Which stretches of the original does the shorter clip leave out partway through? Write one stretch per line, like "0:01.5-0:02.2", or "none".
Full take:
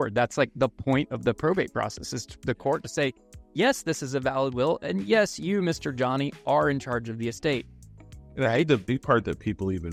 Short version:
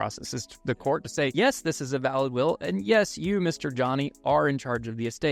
0:03.1-0:03.5